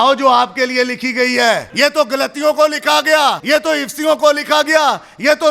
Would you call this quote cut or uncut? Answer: cut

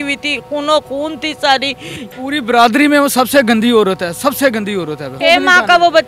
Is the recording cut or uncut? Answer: cut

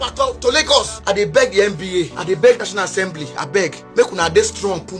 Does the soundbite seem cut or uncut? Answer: cut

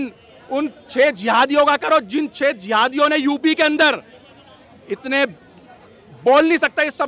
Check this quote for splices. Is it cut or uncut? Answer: uncut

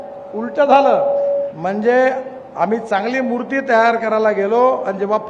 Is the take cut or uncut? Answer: cut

